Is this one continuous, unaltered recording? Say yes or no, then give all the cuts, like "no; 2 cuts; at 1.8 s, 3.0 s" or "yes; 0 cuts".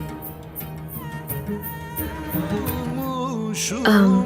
no; 1 cut; at 2.7 s